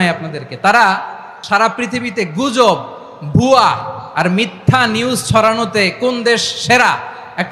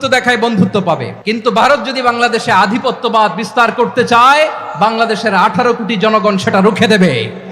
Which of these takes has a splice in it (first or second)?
second